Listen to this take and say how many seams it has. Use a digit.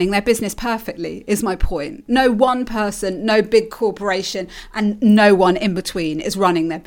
0